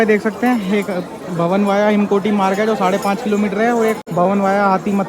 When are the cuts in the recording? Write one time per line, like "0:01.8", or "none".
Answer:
0:04.0